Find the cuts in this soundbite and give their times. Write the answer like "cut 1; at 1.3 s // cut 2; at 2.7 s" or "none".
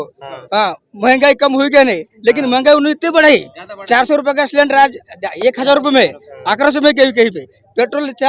none